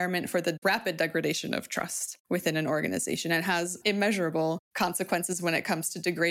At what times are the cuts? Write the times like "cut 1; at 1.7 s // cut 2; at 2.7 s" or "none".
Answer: none